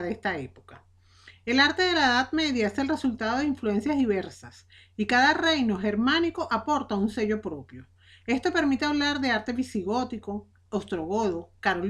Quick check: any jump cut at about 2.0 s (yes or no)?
yes